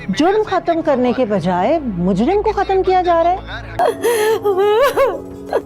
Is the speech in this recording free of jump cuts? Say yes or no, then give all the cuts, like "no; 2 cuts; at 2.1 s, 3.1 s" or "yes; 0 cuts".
no; 1 cut; at 3.8 s